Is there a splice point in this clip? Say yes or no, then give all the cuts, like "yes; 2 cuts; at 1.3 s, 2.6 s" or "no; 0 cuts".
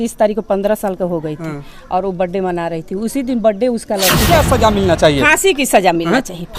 yes; 1 cut; at 4.3 s